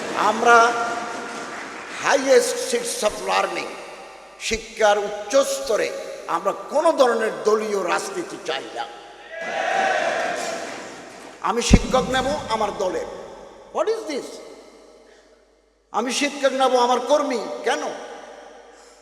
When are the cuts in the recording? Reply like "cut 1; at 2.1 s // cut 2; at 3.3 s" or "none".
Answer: none